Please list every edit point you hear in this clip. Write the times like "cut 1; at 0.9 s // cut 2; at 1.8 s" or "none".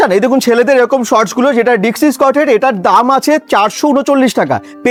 none